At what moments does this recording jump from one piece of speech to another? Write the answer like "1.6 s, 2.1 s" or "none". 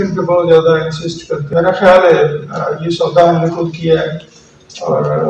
1.3 s